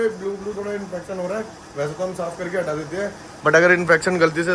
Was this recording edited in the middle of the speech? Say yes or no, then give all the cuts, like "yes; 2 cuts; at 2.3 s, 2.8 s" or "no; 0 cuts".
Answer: no; 0 cuts